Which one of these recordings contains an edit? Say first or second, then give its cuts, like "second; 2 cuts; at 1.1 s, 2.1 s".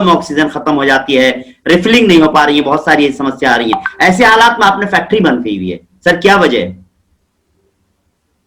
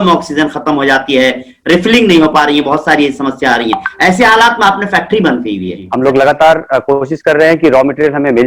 second; 1 cut; at 5.8 s